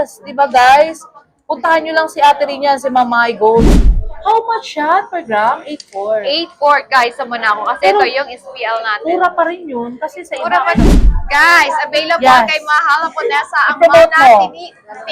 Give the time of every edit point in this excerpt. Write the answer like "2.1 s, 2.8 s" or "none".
3.9 s, 10.9 s

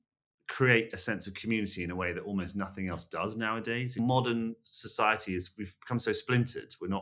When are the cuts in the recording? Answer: 4.0 s

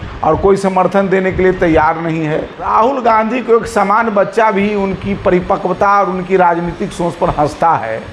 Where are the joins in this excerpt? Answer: 2.7 s

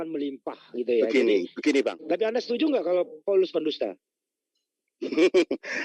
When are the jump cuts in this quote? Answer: 2.0 s

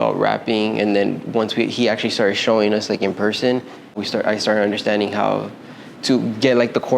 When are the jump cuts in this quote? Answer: 4.0 s

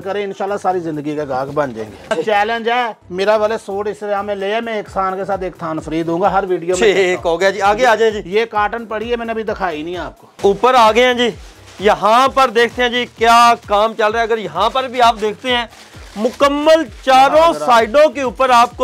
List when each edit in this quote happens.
2.1 s, 10.4 s

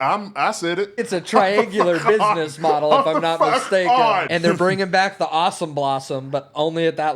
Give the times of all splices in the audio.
1.0 s, 4.3 s

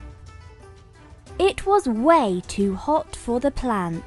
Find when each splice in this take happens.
1.4 s

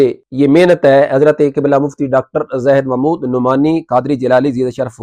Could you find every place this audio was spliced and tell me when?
none

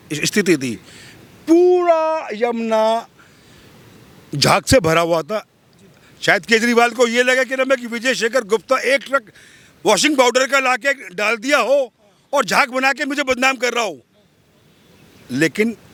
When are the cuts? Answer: none

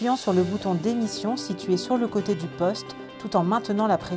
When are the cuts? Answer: none

